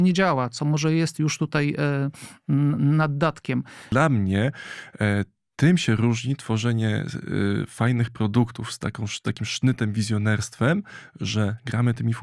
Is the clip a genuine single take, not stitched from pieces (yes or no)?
no